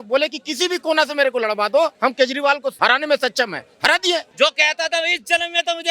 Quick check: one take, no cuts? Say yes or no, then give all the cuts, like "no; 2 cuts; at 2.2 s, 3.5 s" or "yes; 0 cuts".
no; 2 cuts; at 2.2 s, 4.3 s